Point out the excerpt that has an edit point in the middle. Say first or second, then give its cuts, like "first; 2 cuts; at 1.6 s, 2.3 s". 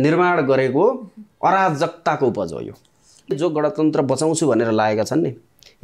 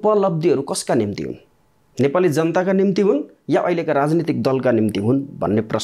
first; 1 cut; at 3.3 s